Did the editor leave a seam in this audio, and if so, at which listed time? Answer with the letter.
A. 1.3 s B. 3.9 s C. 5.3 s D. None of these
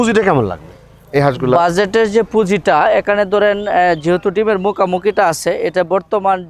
D